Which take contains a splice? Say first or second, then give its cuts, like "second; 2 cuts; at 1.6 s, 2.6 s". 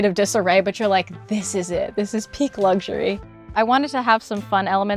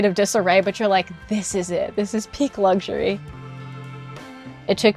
first; 1 cut; at 3.4 s